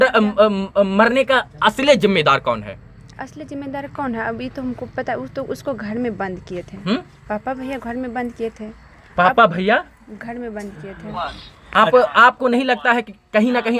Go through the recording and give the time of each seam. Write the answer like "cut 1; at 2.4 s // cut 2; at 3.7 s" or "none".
none